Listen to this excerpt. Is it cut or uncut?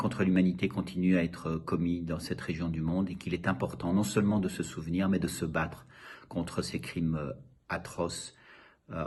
uncut